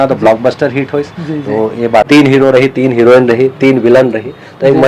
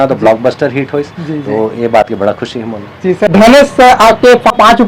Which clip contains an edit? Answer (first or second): first